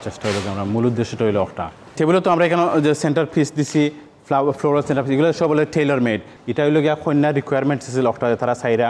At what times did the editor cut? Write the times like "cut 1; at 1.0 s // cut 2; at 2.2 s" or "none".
cut 1; at 6.3 s